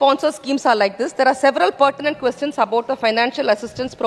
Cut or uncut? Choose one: uncut